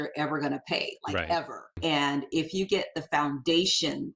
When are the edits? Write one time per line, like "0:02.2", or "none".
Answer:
0:01.7